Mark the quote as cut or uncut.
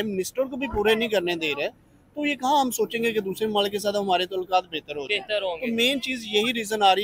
uncut